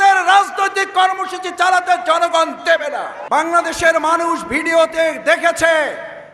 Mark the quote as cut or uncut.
cut